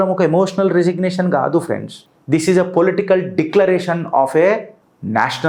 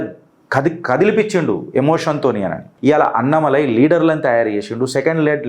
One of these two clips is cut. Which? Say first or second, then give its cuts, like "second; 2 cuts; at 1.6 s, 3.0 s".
second; 1 cut; at 2.7 s